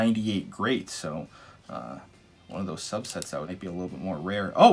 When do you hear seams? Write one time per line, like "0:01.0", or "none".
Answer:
0:03.5